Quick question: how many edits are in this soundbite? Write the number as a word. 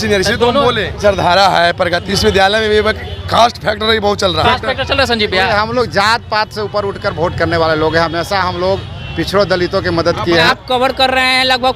four